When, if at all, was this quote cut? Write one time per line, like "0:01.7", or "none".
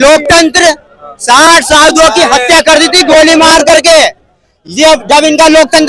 none